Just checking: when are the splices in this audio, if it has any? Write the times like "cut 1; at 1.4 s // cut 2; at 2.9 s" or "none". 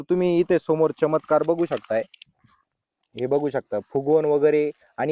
none

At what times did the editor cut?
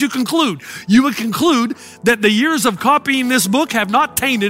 none

